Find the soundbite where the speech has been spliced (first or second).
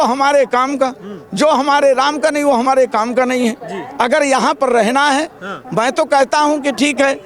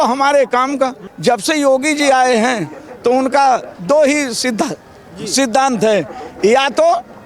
second